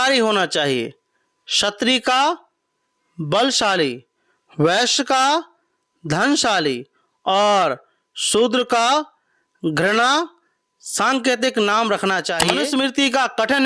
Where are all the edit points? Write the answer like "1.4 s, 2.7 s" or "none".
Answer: 12.5 s